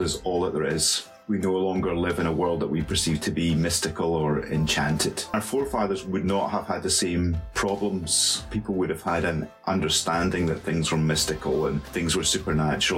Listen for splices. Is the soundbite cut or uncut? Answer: cut